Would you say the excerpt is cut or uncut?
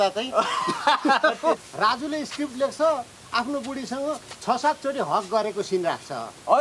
cut